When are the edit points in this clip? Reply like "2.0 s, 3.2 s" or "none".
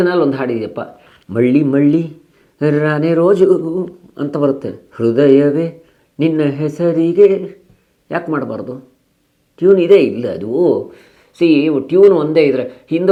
none